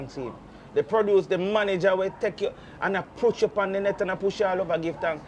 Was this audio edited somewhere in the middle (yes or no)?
no